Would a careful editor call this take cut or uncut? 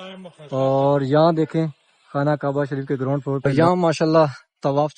cut